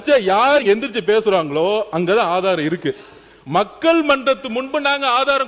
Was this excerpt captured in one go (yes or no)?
yes